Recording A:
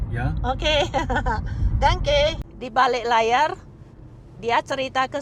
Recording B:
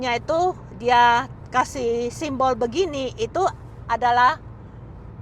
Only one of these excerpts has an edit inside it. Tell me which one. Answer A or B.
A